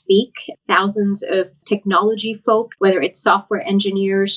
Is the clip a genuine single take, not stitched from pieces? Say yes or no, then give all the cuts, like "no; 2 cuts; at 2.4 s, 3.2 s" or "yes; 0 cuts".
no; 2 cuts; at 1.6 s, 2.7 s